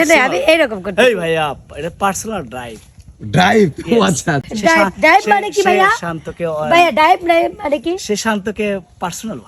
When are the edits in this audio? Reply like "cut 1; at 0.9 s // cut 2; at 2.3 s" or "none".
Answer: none